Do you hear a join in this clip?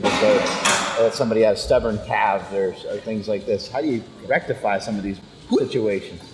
no; 0 cuts

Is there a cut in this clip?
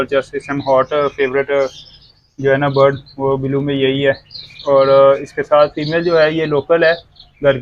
no; 0 cuts

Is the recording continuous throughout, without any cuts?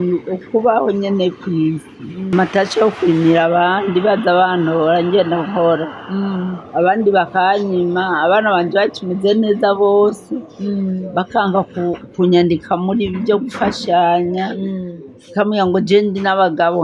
no; 1 cut; at 2.3 s

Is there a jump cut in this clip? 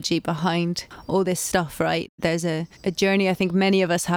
yes; 2 cuts; at 0.9 s, 2.2 s

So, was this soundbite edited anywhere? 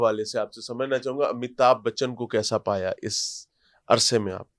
no; 0 cuts

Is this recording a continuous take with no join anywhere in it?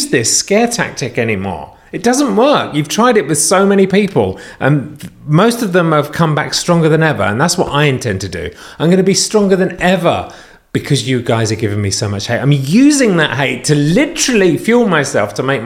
yes; 0 cuts

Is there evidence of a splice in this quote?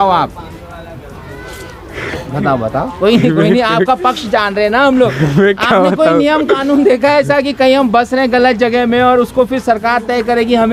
no; 0 cuts

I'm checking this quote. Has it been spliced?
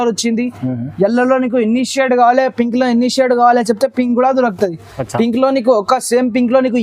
no; 0 cuts

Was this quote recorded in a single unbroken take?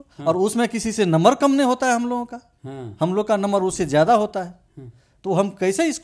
yes; 0 cuts

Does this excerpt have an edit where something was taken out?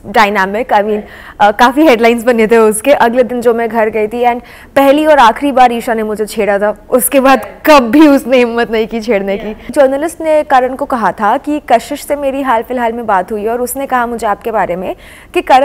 yes; 1 cut; at 9.7 s

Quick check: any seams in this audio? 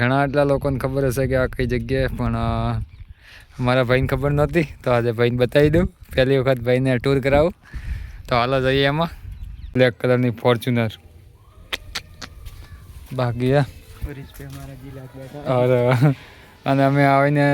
yes; 1 cut; at 9.7 s

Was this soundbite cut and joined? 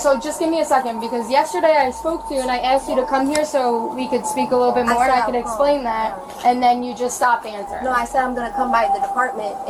no; 0 cuts

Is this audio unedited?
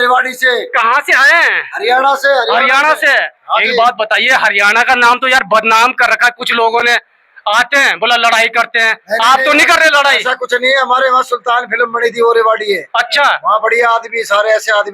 yes; 0 cuts

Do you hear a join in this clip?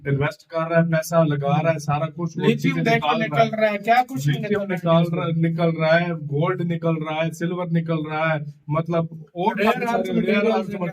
no; 0 cuts

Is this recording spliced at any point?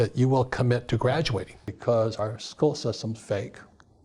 yes; 1 cut; at 1.7 s

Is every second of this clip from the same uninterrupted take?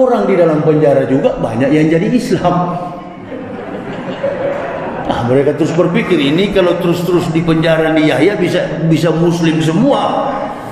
yes; 0 cuts

